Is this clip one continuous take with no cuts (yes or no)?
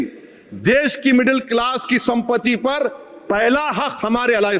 yes